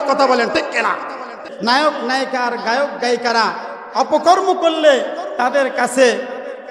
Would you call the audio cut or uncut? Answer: cut